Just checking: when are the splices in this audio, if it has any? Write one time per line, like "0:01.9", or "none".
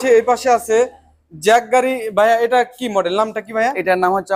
none